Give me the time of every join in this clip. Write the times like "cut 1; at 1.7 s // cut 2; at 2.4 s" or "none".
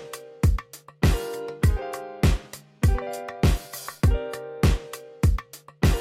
cut 1; at 4.4 s